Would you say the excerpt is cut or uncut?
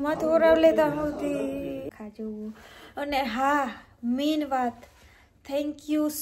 cut